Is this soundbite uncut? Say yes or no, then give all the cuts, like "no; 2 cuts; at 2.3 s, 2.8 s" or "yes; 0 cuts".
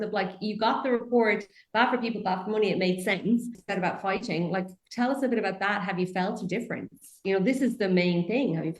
no; 1 cut; at 3.6 s